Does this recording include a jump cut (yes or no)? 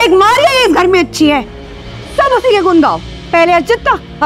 no